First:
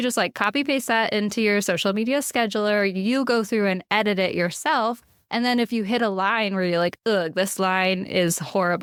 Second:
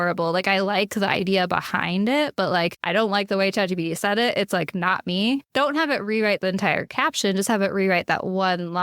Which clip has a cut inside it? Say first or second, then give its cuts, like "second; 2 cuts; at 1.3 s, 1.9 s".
second; 2 cuts; at 2.8 s, 5.5 s